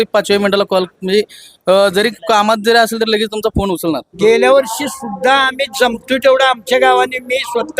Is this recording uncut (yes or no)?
no